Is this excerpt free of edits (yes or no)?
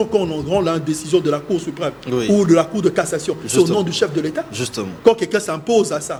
yes